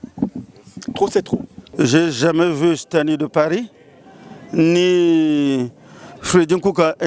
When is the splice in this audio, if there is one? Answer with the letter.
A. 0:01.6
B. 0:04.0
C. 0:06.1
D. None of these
A